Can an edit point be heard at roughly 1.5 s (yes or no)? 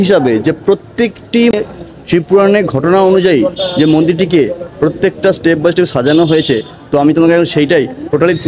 yes